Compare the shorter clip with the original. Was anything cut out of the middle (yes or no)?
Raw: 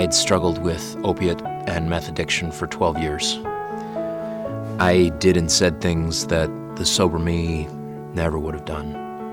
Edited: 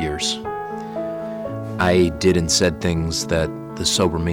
no